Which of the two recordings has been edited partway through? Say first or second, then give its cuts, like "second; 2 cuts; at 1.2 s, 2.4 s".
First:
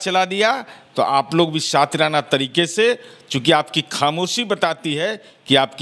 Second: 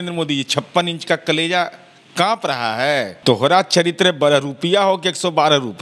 second; 1 cut; at 3.1 s